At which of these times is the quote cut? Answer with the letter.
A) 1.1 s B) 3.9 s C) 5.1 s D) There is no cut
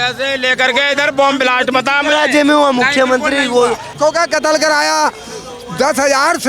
B